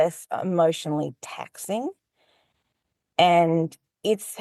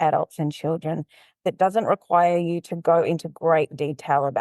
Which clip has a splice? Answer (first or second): second